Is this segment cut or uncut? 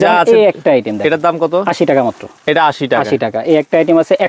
uncut